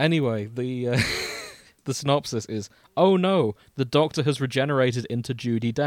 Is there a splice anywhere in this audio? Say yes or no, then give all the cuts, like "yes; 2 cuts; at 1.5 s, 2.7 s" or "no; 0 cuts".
yes; 1 cut; at 1.7 s